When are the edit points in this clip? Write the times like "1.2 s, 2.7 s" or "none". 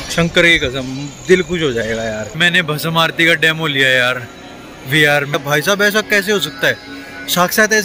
2.4 s, 5.3 s